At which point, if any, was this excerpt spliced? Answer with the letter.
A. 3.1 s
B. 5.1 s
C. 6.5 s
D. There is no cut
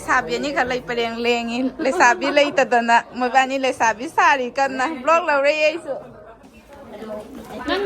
C